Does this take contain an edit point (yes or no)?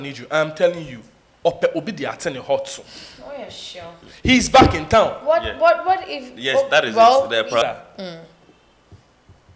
yes